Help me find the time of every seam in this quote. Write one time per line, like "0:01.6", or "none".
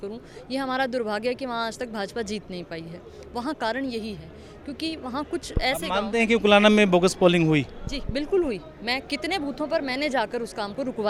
none